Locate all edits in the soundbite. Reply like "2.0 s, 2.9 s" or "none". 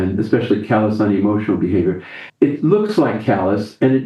2.1 s